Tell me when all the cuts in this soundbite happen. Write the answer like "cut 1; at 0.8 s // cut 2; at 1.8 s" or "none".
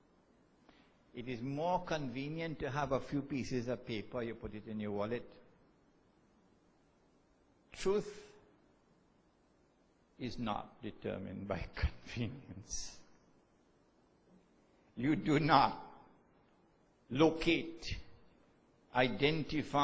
none